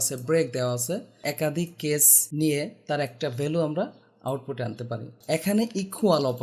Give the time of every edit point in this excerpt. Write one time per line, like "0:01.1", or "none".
0:01.2
0:02.2
0:05.1